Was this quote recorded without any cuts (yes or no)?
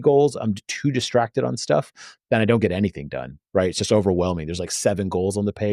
yes